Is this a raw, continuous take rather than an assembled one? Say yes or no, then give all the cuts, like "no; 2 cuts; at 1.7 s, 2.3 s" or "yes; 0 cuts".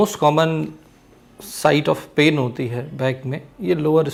yes; 0 cuts